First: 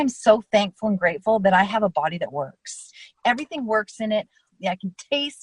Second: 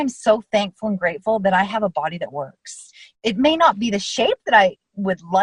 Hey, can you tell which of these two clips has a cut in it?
first; 2 cuts; at 3.1 s, 4.5 s

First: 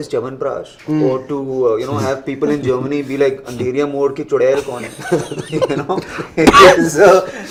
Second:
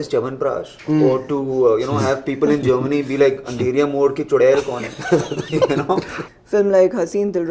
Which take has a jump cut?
second; 1 cut; at 6.2 s

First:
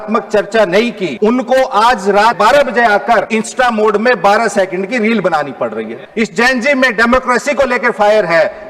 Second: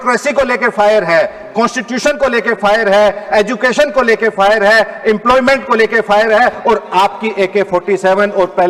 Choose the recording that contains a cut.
first; 4 cuts; at 1.0 s, 2.4 s, 3.3 s, 6.0 s

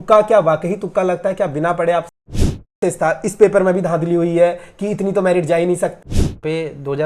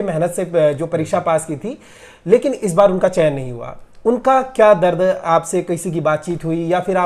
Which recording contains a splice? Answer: first; 2 cuts; at 2.6 s, 6.0 s

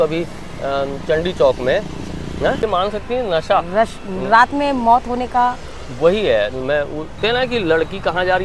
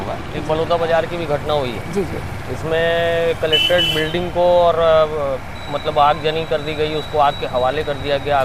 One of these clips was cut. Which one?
first; 2 cuts; at 2.6 s, 7.2 s

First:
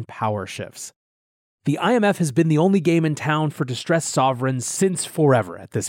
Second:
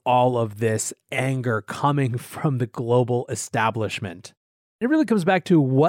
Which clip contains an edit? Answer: second; 1 cut; at 4.8 s

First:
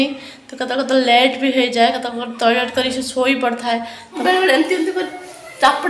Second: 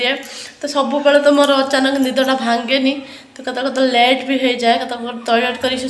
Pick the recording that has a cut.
first; 1 cut; at 4.2 s

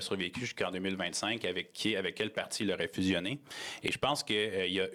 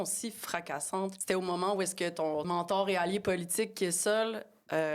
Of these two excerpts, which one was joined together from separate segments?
second; 2 cuts; at 1.2 s, 2.5 s

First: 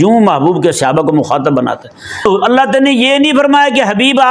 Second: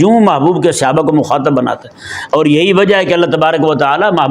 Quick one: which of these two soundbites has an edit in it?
first; 1 cut; at 2.2 s

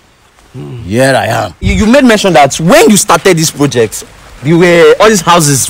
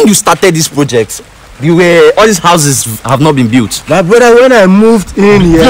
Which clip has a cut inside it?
first; 1 cut; at 1.6 s

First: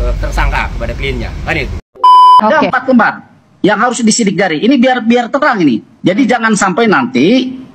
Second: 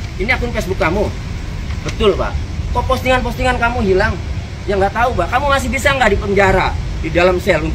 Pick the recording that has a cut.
first; 1 cut; at 1.8 s

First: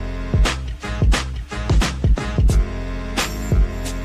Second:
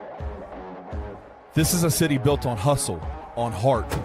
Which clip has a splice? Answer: second; 1 cut; at 1.0 s

